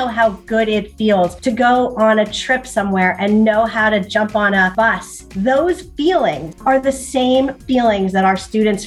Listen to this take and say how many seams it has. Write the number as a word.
three